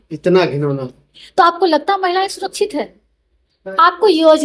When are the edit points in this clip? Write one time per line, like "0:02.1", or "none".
none